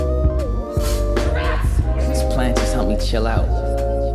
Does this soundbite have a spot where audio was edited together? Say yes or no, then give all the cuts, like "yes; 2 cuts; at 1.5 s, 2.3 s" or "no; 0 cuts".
yes; 1 cut; at 1.3 s